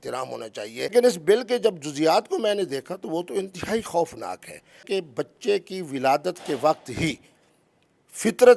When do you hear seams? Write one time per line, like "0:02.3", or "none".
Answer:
0:00.9
0:04.8